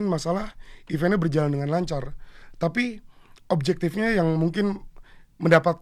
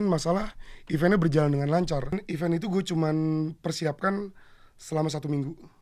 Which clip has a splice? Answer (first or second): second